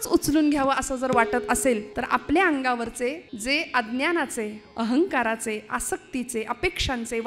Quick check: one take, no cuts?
no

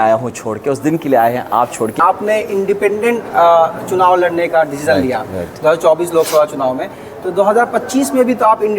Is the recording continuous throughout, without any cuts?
no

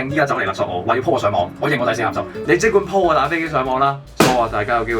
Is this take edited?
yes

